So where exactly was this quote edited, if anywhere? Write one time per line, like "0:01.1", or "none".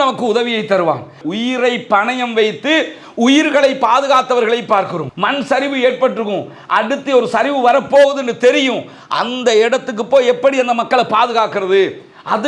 0:01.2